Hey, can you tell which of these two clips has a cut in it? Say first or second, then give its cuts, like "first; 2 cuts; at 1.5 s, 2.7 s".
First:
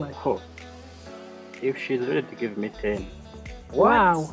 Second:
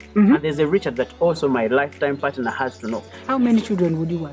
second; 1 cut; at 3.1 s